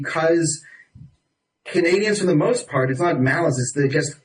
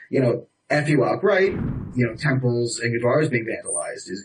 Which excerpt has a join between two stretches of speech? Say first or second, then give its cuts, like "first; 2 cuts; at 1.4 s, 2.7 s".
second; 1 cut; at 1.6 s